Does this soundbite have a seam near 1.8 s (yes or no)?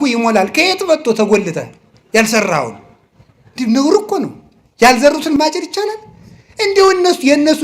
no